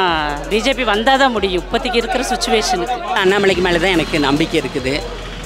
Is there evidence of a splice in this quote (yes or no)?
yes